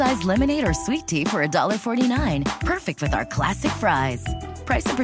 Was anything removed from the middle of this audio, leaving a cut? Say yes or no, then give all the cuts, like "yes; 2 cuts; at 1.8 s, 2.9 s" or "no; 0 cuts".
no; 0 cuts